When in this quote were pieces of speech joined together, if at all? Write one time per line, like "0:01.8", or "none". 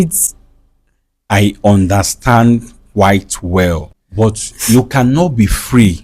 0:03.9

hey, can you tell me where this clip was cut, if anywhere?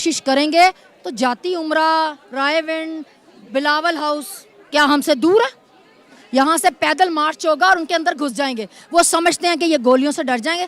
none

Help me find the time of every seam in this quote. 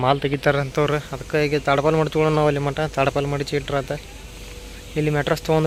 none

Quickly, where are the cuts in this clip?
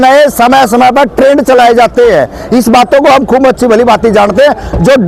none

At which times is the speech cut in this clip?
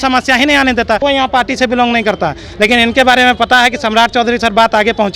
0:01.0

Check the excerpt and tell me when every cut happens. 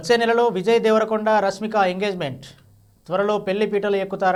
none

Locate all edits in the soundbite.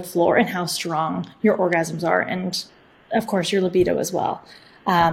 none

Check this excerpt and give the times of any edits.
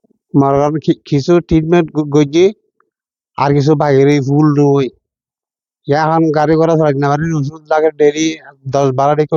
none

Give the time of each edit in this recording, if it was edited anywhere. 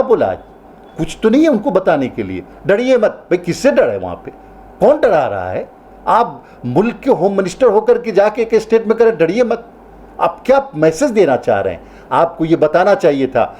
none

